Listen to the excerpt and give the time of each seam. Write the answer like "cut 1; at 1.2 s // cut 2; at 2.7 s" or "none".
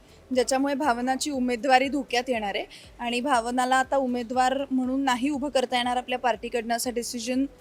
none